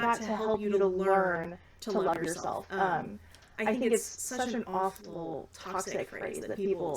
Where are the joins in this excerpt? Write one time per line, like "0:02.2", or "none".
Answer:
none